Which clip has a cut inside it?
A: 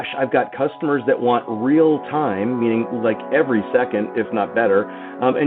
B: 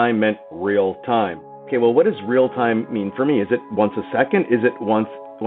B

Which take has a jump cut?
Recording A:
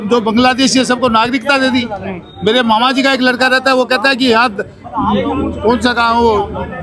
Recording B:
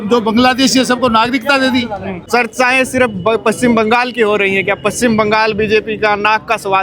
B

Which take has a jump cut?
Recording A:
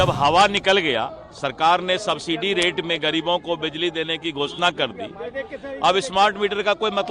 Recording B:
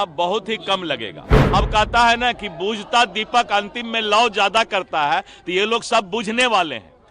B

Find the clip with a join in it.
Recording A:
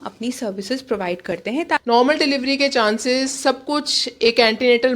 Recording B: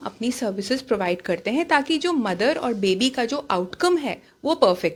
A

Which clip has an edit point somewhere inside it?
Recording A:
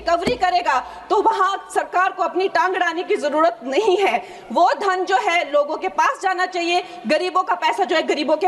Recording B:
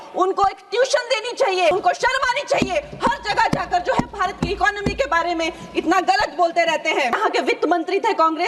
B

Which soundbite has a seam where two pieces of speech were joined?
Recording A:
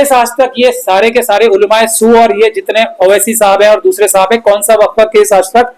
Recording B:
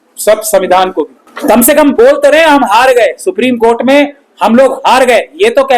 B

